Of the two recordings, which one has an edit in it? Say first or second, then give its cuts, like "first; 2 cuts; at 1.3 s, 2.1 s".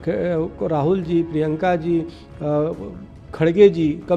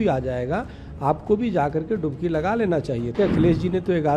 second; 1 cut; at 3.1 s